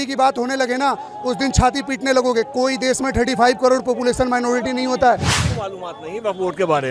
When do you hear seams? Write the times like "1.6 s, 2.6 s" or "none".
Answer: 5.4 s